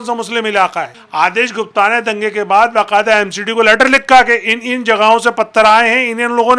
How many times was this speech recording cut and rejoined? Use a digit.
1